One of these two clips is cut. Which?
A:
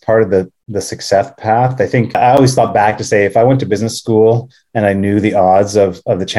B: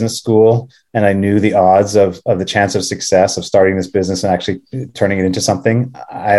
A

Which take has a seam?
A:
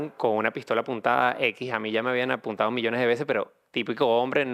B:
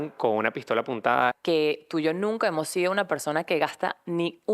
B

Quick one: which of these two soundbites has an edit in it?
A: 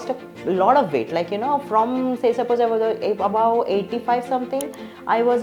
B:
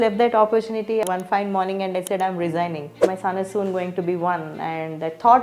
B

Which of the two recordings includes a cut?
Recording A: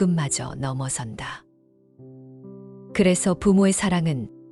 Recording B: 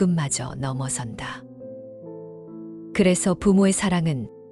B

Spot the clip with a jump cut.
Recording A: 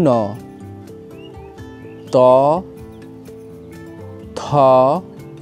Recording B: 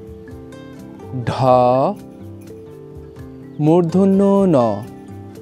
B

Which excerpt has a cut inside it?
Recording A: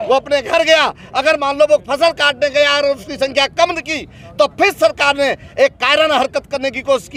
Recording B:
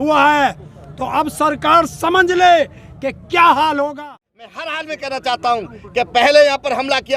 B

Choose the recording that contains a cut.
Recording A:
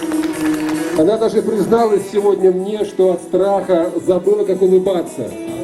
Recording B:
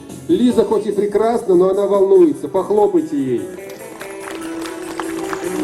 A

